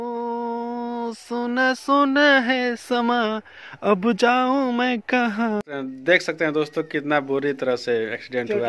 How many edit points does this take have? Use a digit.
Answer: 1